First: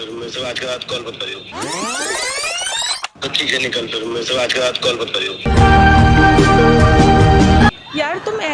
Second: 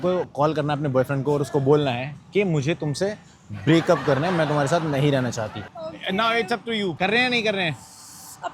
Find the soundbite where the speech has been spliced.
second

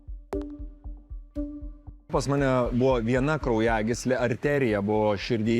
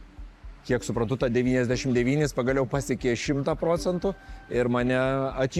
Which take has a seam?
first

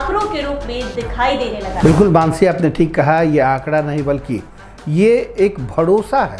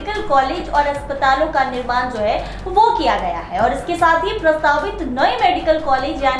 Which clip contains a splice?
first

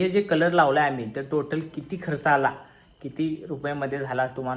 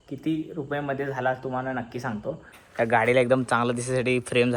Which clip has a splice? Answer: second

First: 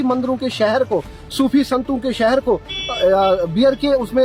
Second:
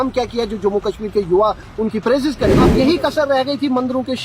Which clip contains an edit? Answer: second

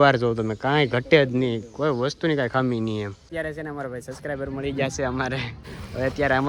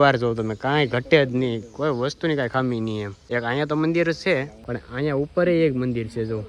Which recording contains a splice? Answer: first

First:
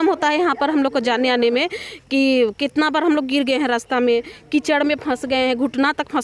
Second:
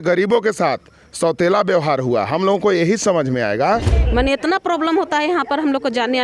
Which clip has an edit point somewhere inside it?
second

